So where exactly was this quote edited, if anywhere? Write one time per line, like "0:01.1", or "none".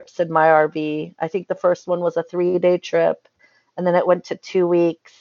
none